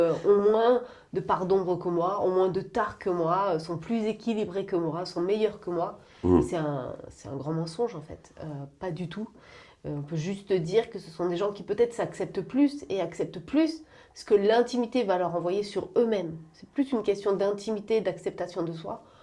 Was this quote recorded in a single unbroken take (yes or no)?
yes